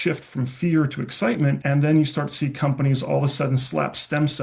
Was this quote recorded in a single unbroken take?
no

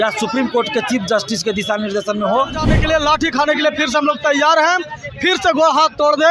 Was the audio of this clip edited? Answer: yes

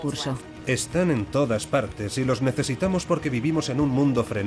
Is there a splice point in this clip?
yes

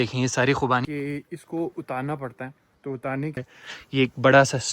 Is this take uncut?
no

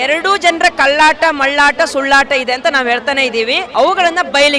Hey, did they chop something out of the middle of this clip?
yes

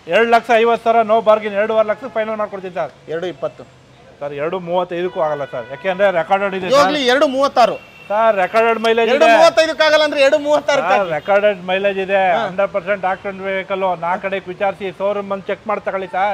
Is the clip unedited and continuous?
yes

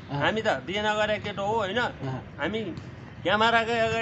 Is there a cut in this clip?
no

